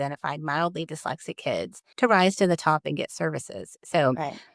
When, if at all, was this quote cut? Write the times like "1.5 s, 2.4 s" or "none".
1.8 s